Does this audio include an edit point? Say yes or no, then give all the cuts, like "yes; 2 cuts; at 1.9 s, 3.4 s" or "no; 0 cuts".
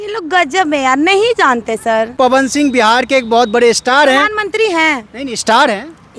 yes; 1 cut; at 2.1 s